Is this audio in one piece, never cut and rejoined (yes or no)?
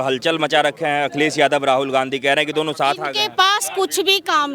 yes